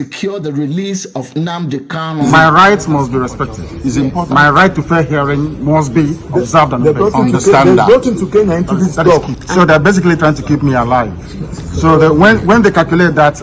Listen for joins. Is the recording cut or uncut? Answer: cut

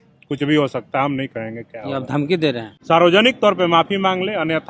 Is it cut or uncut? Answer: cut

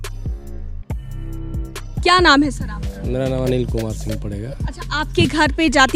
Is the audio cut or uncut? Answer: uncut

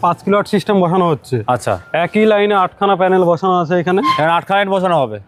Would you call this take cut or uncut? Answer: uncut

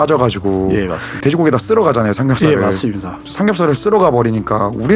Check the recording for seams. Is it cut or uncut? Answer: cut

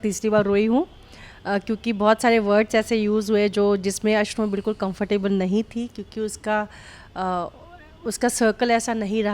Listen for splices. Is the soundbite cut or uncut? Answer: uncut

